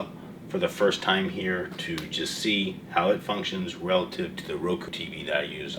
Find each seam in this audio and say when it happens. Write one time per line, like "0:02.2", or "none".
0:04.8